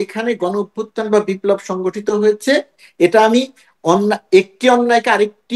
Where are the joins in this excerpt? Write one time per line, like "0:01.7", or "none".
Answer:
none